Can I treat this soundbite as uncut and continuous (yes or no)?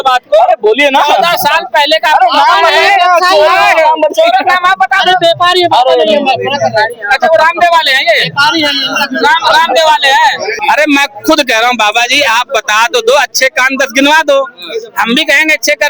no